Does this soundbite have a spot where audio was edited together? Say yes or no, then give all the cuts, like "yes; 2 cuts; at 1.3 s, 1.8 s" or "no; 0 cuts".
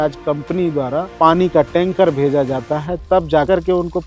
yes; 1 cut; at 1.1 s